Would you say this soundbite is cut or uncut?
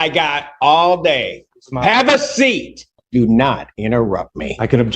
cut